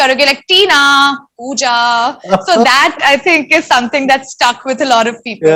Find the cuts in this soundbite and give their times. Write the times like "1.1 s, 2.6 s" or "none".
none

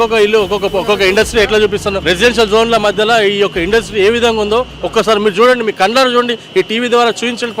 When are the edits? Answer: 2.0 s

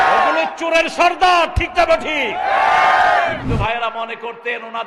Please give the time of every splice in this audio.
3.4 s

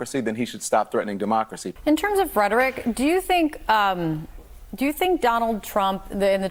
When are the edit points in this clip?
none

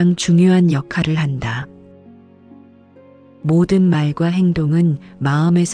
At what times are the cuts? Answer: 1.7 s, 3.4 s

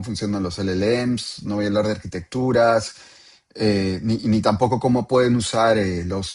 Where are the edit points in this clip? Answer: none

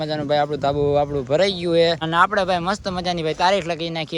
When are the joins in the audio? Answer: 2.0 s

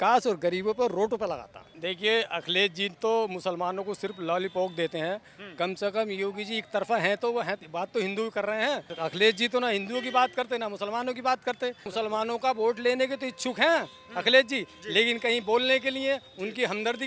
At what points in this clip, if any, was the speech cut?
1.6 s, 8.9 s, 11.9 s

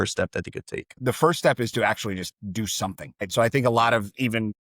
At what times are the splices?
0.9 s

